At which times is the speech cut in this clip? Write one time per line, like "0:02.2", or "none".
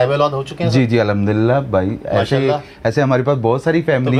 none